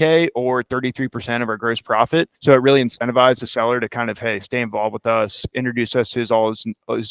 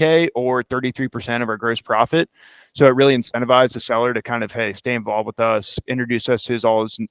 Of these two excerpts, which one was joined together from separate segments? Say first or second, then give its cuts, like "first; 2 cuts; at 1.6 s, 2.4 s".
first; 1 cut; at 2.3 s